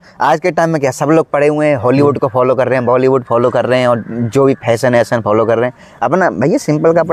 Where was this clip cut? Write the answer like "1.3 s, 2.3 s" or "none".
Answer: none